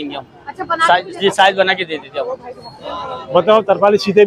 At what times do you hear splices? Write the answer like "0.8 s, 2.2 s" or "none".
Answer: none